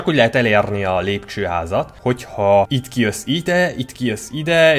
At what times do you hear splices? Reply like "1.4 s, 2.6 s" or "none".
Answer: 1.9 s, 2.8 s